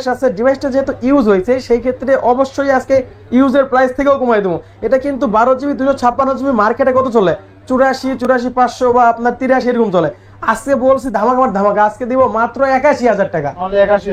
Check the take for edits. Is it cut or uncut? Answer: uncut